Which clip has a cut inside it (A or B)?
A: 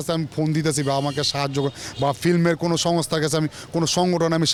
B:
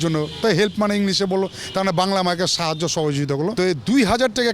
B